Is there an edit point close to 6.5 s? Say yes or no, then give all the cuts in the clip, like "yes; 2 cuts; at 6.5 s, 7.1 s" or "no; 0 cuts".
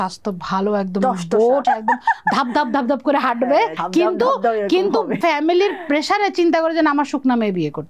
no; 3 cuts; at 1.6 s, 3.8 s, 5.2 s